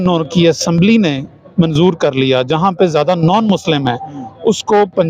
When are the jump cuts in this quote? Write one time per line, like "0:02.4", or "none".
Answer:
none